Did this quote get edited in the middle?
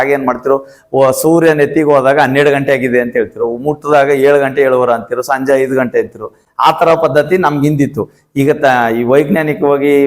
no; 0 cuts

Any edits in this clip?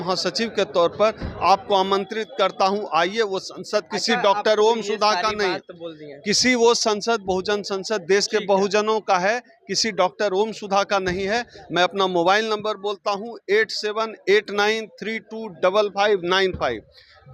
no; 0 cuts

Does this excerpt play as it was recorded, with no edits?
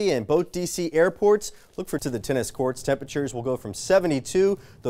no; 1 cut; at 2.0 s

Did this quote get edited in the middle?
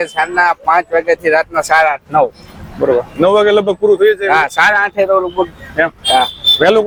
no; 0 cuts

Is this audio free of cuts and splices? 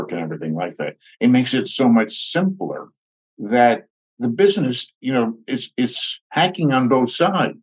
yes; 0 cuts

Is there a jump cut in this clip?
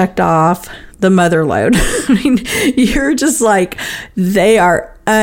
no; 0 cuts

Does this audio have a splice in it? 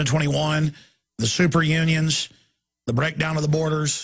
yes; 1 cut; at 2.8 s

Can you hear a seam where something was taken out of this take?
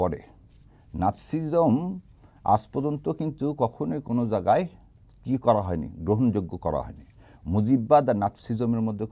no; 0 cuts

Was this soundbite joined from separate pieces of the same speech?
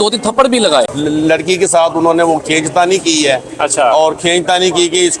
yes; 1 cut; at 0.9 s

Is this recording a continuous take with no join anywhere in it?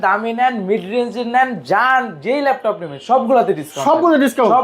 yes; 0 cuts

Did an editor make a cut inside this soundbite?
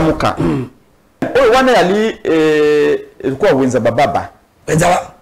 yes; 1 cut; at 1.3 s

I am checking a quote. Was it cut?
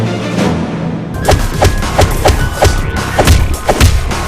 yes; 1 cut; at 1.0 s

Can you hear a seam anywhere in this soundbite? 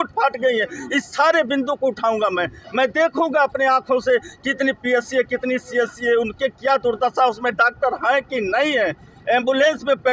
no; 0 cuts

